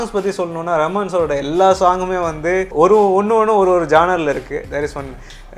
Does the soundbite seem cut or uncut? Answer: cut